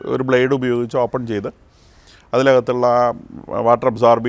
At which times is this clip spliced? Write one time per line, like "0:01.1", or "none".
none